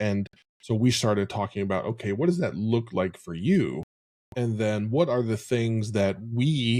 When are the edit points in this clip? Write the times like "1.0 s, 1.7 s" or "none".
none